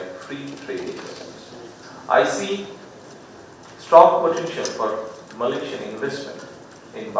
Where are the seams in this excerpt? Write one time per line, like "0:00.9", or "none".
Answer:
0:01.8